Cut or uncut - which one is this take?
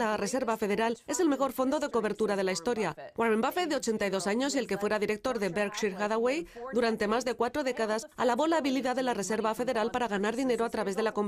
uncut